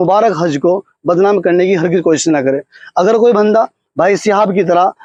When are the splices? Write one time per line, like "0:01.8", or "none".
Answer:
none